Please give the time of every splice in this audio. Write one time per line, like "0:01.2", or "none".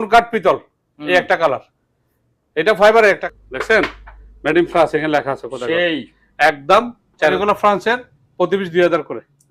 0:03.2
0:07.3